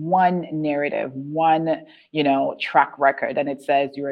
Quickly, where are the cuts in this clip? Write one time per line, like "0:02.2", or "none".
none